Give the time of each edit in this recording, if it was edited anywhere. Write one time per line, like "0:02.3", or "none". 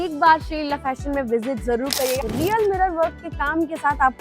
0:02.2